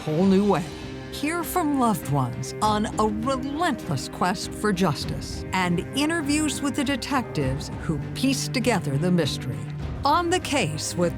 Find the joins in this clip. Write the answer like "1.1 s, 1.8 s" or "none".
none